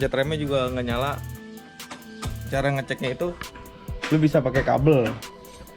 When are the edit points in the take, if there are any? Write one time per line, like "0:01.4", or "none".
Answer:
0:02.5